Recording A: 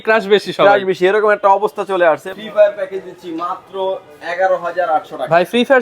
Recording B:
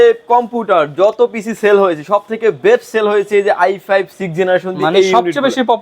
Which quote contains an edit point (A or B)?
A